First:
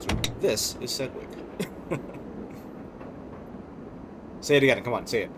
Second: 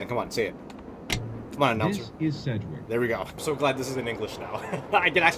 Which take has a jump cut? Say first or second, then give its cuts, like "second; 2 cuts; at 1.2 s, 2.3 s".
second; 1 cut; at 3.4 s